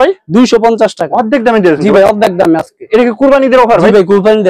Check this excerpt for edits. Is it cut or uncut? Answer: uncut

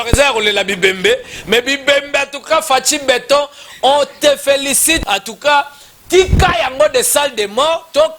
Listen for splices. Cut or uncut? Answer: cut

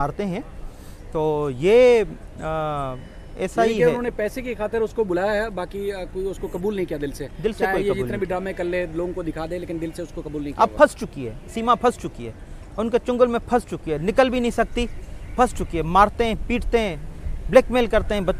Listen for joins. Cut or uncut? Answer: uncut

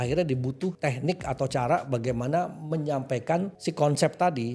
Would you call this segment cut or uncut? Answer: cut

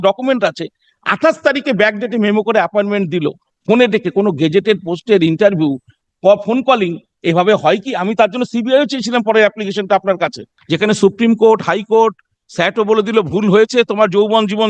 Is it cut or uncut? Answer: cut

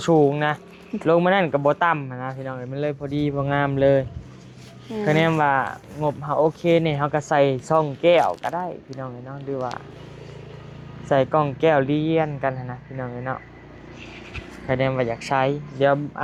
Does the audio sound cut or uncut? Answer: uncut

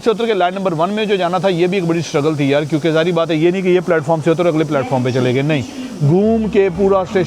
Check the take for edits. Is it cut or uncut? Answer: uncut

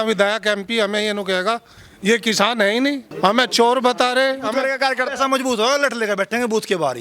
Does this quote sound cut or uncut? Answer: cut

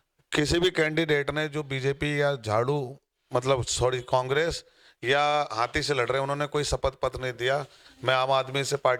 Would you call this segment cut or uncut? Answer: uncut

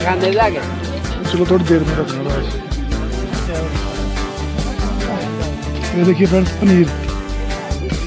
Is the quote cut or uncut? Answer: uncut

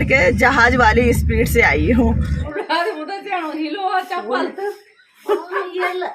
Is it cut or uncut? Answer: cut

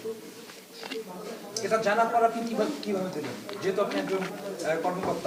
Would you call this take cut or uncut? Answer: uncut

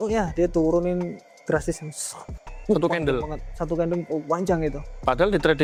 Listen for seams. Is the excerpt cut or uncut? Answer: uncut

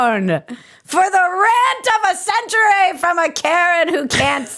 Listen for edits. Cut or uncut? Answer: uncut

